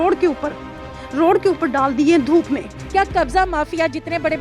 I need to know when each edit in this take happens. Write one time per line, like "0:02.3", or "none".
0:02.8